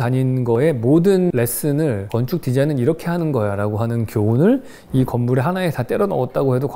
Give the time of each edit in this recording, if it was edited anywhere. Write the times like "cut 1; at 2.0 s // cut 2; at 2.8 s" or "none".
none